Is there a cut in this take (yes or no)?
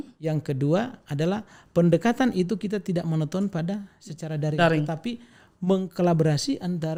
no